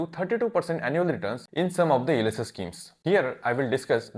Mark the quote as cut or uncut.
cut